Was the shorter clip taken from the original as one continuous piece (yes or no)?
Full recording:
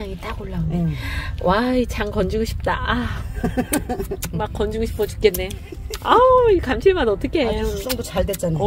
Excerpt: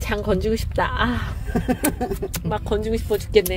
yes